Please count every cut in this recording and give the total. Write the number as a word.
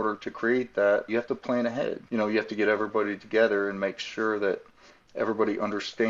one